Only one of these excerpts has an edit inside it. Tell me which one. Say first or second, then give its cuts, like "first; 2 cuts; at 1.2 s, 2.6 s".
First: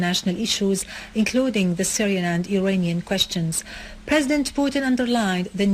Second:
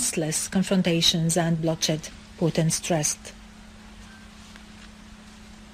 first; 1 cut; at 4.3 s